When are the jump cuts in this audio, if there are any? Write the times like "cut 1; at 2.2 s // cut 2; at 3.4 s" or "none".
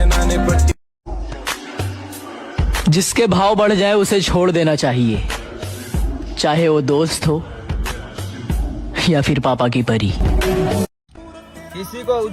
cut 1; at 0.9 s // cut 2; at 11.2 s